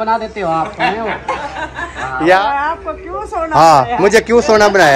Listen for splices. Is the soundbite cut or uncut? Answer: cut